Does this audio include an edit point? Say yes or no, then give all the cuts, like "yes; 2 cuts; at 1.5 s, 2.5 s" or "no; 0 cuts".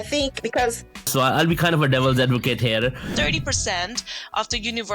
yes; 2 cuts; at 1.1 s, 3.1 s